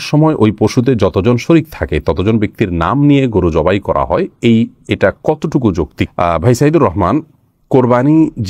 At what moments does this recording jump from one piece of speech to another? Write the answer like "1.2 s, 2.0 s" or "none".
none